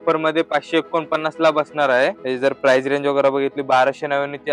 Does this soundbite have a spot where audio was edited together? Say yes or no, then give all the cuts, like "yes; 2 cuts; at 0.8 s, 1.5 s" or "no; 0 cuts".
yes; 1 cut; at 2.2 s